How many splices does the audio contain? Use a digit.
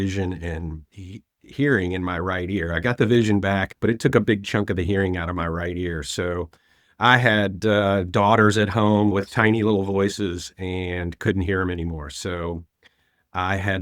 2